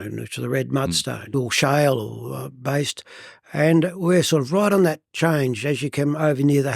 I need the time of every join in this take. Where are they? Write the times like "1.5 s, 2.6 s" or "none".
1.3 s